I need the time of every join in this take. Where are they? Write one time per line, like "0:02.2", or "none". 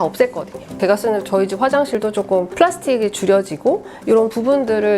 0:00.8
0:02.1